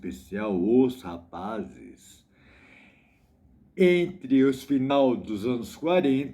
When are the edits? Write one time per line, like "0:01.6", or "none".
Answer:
0:04.9